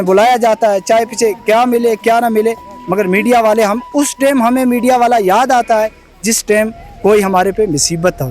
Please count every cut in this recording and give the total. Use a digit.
0